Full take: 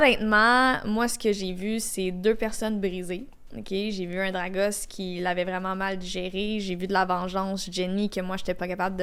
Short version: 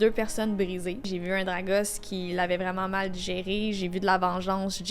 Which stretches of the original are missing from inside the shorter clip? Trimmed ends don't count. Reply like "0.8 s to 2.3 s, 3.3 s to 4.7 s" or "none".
3.3 s to 3.9 s